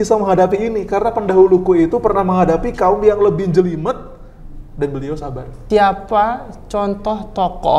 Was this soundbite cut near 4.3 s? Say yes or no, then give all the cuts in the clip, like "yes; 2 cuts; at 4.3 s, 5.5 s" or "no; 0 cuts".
no; 1 cut; at 5.6 s